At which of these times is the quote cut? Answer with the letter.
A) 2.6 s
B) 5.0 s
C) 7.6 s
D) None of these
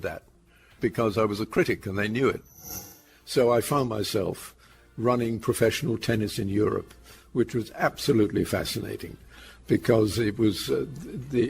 A